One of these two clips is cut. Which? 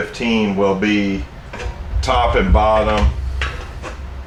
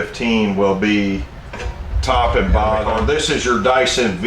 second; 1 cut; at 2.9 s

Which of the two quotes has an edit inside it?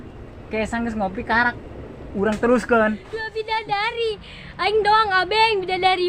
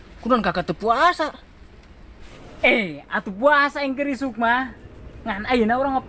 first; 1 cut; at 3.3 s

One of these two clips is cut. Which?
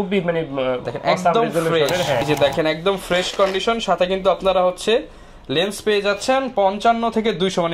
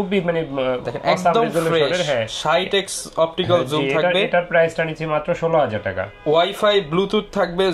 first; 1 cut; at 2.3 s

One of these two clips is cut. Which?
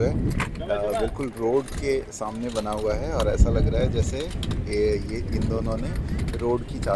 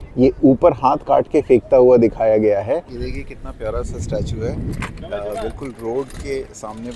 second; 1 cut; at 3.0 s

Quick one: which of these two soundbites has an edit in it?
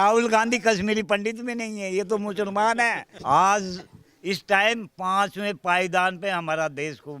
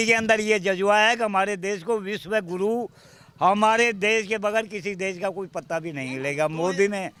first; 1 cut; at 3.1 s

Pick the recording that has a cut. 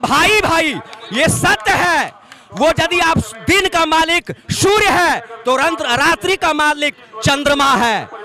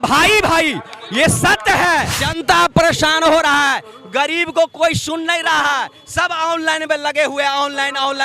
second; 1 cut; at 2.2 s

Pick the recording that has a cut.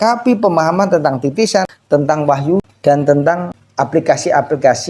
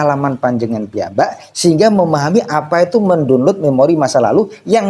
first; 3 cuts; at 1.8 s, 2.7 s, 3.6 s

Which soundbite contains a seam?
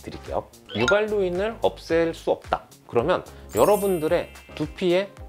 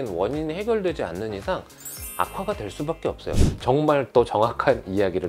second; 1 cut; at 3.4 s

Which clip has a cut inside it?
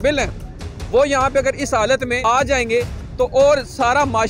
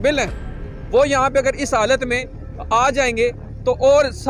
first; 1 cut; at 2.2 s

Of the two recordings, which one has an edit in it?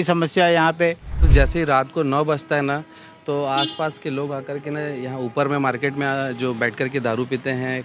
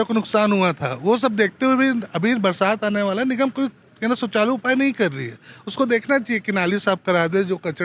first; 1 cut; at 1.3 s

